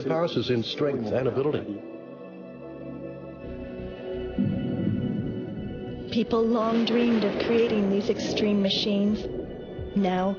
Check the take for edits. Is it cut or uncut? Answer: cut